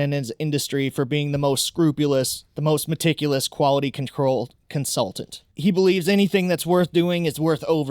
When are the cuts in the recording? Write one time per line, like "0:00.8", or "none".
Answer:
0:02.4
0:05.5